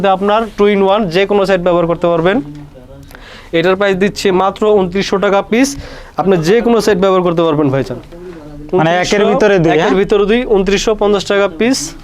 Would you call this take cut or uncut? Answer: uncut